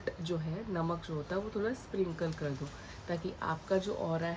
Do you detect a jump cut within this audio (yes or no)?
no